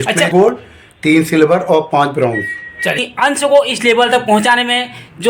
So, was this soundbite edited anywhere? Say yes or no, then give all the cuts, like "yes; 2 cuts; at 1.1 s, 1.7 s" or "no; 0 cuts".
yes; 1 cut; at 3.1 s